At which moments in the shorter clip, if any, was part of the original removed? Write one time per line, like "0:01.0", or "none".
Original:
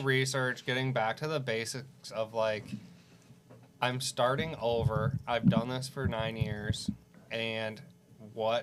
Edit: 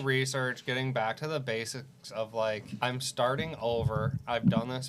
0:02.7